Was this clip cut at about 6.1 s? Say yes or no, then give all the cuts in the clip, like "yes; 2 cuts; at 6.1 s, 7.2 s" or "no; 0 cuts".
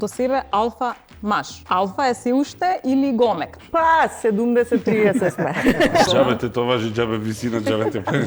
yes; 3 cuts; at 1.5 s, 3.5 s, 6.1 s